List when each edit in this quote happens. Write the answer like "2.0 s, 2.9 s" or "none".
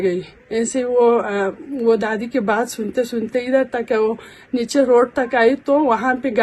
none